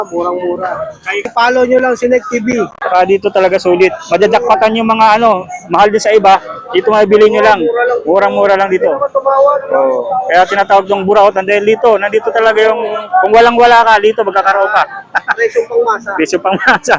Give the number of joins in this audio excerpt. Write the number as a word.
two